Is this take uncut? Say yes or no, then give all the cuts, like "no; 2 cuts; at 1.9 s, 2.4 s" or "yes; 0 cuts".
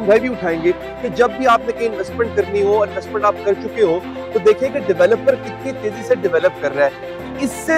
yes; 0 cuts